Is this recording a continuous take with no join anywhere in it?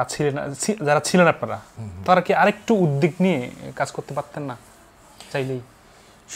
yes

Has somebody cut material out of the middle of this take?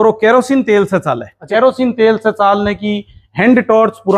yes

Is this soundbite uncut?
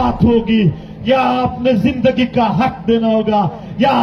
yes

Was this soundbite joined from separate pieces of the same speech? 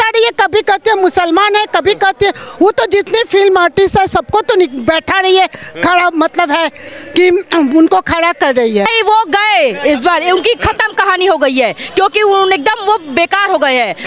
yes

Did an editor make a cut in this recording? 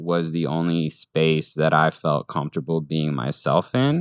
no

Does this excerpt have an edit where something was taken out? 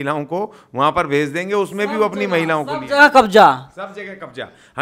no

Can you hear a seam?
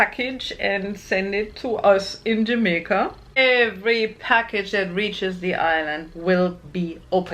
yes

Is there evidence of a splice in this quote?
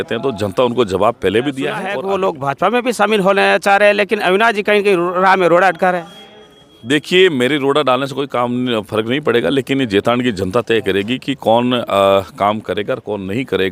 yes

